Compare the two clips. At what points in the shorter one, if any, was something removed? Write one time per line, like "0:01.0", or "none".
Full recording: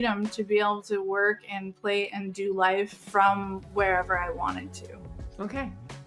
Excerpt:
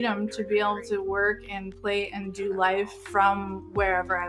none